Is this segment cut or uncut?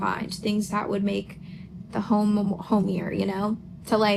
uncut